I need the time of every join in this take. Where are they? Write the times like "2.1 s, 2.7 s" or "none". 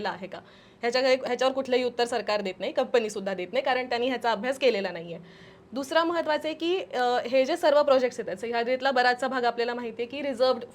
none

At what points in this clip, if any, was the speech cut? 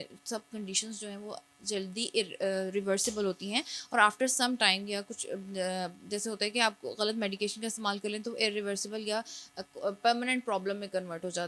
none

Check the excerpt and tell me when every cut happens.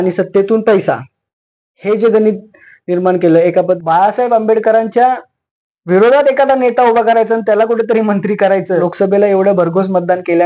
3.8 s, 8.9 s

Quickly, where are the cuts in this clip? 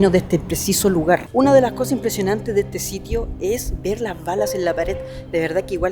1.3 s

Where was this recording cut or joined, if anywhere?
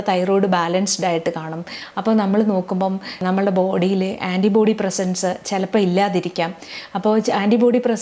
3.1 s

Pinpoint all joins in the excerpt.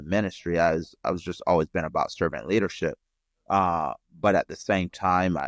none

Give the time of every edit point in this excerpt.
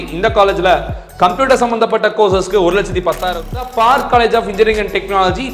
3.6 s

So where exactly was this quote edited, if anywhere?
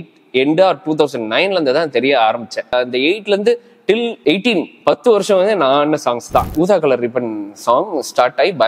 2.7 s, 6.5 s

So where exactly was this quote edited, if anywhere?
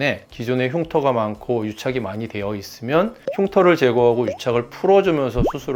none

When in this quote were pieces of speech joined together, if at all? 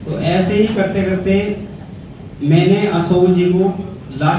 none

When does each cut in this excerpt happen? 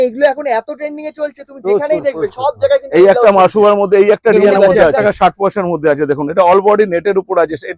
5.0 s

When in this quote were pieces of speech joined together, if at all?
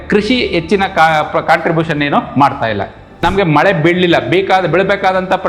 3.1 s

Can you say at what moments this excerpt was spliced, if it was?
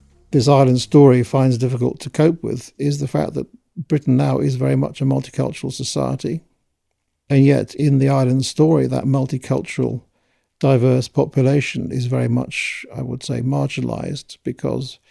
none

